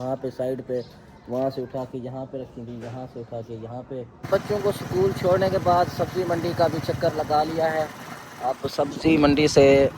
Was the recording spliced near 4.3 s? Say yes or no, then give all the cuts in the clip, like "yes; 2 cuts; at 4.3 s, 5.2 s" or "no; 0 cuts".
yes; 1 cut; at 4.3 s